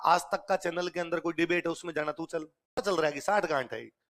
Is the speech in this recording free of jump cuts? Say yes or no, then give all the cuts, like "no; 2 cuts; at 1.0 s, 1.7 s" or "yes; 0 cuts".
no; 1 cut; at 2.8 s